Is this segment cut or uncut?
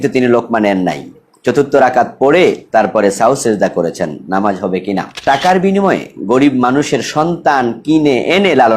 cut